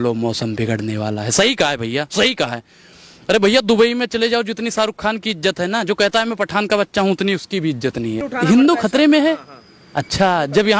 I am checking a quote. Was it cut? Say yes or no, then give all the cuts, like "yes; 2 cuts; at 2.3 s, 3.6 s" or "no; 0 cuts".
yes; 1 cut; at 8.3 s